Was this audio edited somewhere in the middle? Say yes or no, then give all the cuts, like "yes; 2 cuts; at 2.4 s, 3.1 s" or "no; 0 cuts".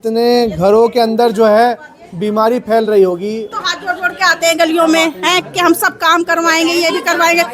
yes; 1 cut; at 3.5 s